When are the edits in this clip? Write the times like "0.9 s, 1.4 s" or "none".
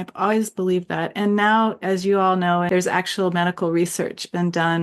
2.7 s